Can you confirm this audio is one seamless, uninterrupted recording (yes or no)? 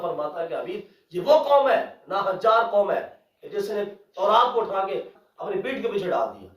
no